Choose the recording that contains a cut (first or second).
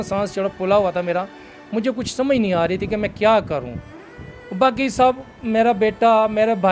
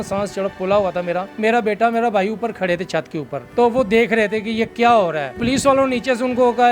second